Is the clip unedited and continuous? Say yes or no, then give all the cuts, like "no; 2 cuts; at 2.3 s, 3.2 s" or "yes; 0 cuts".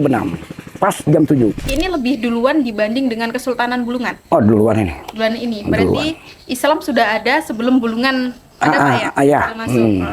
no; 1 cut; at 1.7 s